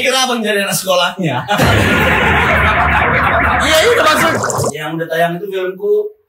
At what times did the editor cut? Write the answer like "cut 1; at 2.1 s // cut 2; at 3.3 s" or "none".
cut 1; at 4.3 s